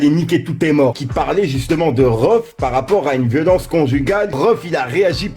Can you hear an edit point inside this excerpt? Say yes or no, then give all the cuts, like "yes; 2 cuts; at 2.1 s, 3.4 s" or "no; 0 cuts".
yes; 2 cuts; at 1.0 s, 4.3 s